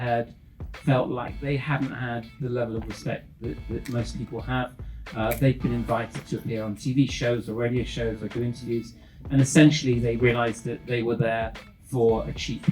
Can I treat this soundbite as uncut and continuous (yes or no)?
yes